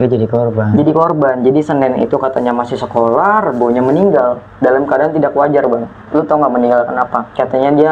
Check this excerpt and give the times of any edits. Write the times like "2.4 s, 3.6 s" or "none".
none